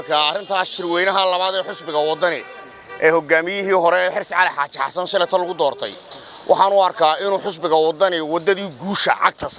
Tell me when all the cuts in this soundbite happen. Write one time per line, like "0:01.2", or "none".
none